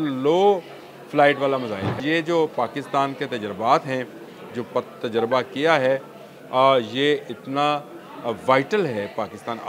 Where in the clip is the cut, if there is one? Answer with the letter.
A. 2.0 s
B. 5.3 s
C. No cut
A